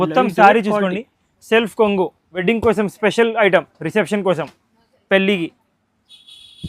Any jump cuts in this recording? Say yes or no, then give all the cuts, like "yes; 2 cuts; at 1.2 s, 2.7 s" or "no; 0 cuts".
yes; 1 cut; at 2.4 s